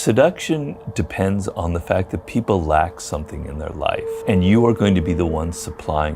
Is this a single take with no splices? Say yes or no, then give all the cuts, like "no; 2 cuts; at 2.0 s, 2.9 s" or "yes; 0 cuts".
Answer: no; 1 cut; at 4.2 s